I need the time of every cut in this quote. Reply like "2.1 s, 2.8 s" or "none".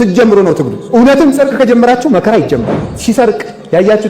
2.9 s